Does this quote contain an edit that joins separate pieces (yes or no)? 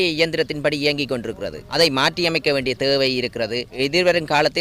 yes